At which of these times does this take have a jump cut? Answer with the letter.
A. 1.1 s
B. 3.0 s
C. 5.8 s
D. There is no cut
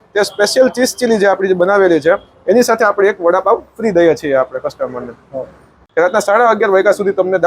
C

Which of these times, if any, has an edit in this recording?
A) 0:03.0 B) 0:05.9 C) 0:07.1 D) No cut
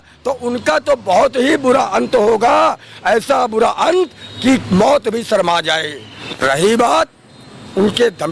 B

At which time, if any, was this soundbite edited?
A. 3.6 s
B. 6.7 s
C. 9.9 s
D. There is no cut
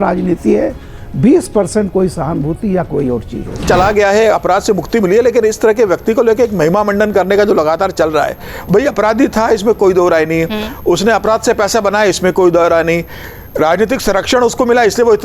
A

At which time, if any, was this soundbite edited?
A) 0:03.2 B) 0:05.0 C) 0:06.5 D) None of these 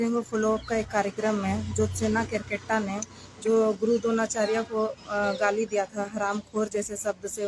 D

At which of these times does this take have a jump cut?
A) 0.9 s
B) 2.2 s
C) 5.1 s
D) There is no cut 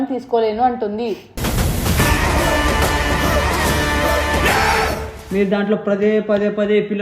C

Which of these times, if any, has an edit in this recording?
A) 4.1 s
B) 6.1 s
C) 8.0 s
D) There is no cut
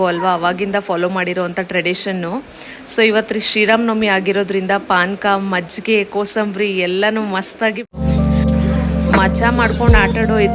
C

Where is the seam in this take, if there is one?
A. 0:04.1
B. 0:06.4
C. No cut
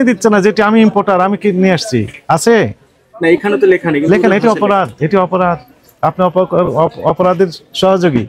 C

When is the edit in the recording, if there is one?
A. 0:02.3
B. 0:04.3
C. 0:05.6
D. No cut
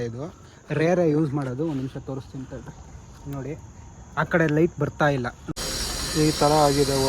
C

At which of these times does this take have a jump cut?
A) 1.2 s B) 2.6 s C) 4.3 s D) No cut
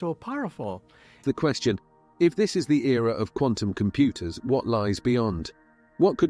A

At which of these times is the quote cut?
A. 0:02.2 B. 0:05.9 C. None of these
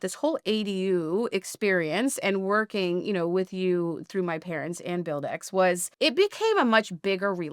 B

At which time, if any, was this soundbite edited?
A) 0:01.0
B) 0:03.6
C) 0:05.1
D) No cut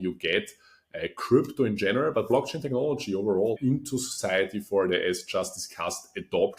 B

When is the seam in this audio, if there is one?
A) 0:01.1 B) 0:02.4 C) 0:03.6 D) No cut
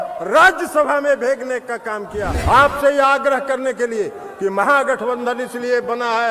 B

